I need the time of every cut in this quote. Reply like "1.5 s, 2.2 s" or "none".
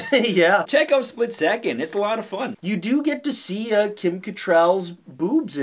2.4 s